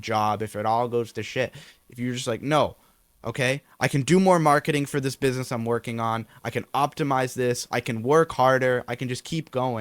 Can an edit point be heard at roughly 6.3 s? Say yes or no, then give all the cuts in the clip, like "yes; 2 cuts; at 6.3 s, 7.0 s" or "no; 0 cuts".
no; 0 cuts